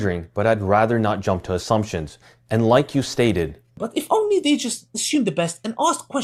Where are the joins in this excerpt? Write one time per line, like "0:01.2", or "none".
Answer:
none